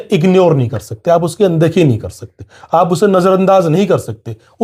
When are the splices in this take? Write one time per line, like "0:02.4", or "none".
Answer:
none